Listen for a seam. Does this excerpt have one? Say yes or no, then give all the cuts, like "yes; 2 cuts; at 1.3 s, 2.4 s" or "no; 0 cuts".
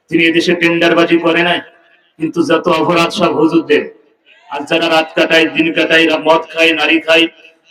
no; 0 cuts